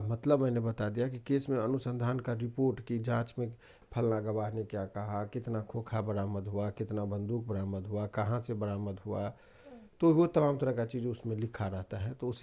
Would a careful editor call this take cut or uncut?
uncut